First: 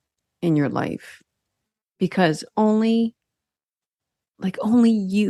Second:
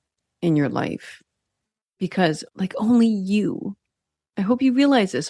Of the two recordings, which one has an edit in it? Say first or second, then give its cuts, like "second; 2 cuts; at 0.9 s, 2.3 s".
second; 1 cut; at 2.4 s